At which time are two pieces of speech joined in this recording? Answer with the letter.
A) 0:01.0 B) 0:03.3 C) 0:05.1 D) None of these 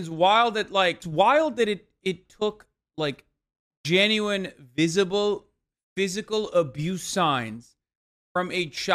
A